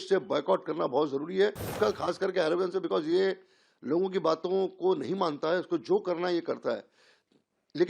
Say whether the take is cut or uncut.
cut